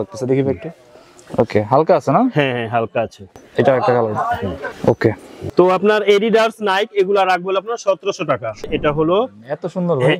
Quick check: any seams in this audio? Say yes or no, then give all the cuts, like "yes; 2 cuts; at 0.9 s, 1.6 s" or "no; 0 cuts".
yes; 4 cuts; at 3.4 s, 4.7 s, 5.3 s, 8.6 s